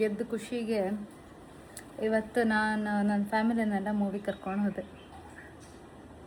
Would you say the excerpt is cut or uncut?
uncut